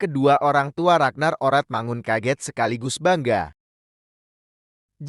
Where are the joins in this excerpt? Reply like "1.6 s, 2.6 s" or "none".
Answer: 4.2 s